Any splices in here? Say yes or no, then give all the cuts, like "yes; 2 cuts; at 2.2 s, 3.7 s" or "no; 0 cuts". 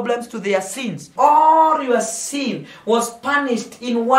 yes; 1 cut; at 1.0 s